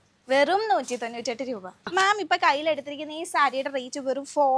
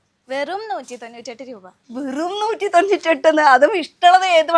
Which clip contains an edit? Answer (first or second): first